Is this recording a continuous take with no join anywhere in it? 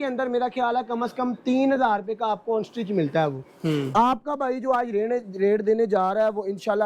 yes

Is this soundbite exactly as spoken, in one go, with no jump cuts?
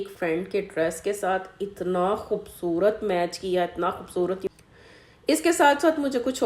no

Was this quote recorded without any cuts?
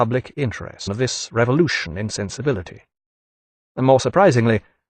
yes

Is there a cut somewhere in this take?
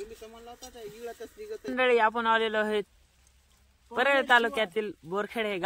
yes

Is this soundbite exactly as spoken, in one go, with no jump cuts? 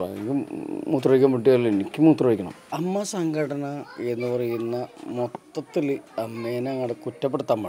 no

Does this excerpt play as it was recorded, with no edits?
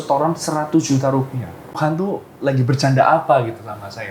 no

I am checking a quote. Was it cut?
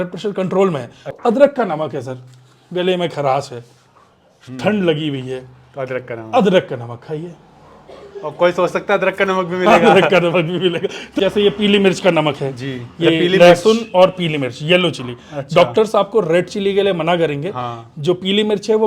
yes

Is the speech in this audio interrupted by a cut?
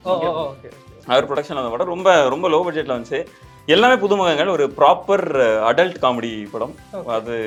no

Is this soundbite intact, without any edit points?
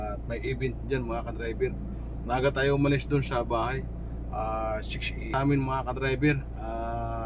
no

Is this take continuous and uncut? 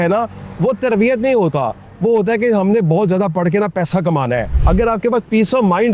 no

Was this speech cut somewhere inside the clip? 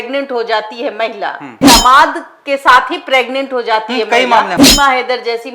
yes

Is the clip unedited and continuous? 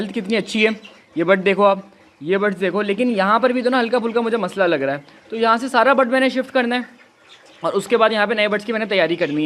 yes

